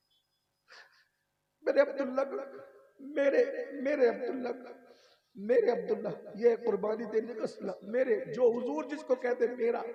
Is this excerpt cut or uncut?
uncut